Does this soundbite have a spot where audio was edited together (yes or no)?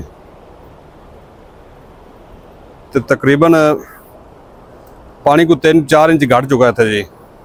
no